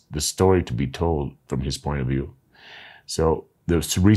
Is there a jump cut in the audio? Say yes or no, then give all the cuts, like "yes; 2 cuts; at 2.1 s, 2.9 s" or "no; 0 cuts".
no; 0 cuts